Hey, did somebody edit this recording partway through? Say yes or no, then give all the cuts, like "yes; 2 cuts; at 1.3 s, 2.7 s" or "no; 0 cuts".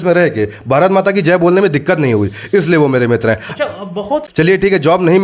yes; 1 cut; at 4.3 s